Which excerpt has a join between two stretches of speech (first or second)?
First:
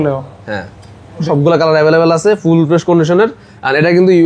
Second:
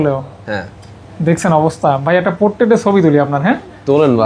first